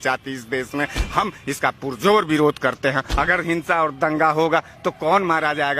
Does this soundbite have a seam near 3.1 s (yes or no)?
yes